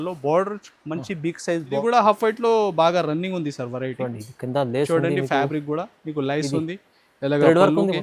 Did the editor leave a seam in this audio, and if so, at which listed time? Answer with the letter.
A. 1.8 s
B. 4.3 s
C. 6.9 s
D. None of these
A